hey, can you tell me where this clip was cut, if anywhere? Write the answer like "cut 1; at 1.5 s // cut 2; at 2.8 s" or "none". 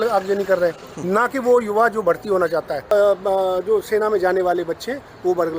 cut 1; at 2.9 s